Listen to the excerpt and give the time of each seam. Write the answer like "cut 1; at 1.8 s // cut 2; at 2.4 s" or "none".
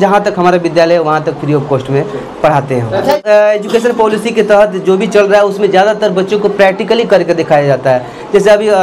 cut 1; at 3.2 s